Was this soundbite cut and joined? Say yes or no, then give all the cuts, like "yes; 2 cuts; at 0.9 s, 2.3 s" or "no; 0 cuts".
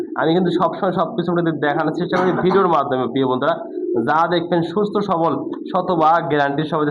no; 0 cuts